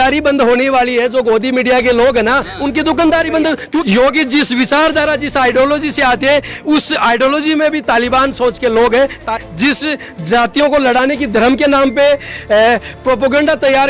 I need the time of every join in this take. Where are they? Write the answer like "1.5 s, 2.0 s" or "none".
3.8 s, 9.3 s